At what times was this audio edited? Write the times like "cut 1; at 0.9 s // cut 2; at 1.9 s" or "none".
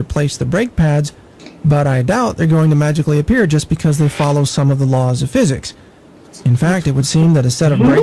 none

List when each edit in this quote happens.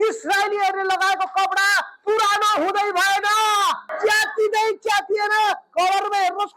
cut 1; at 3.8 s

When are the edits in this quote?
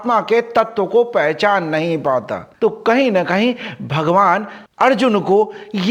none

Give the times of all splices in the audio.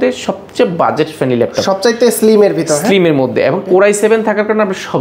none

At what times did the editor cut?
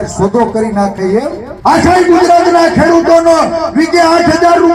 cut 1; at 1.5 s

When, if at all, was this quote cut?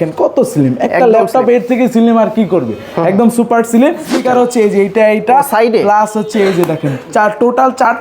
cut 1; at 4.1 s

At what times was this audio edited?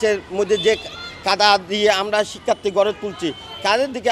none

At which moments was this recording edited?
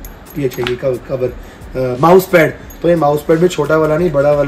none

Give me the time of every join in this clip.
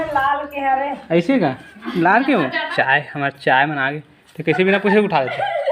cut 1; at 2.7 s

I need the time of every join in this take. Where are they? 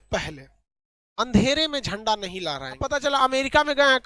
cut 1; at 2.8 s

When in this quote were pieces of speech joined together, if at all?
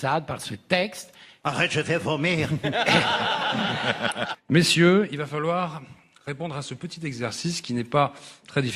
none

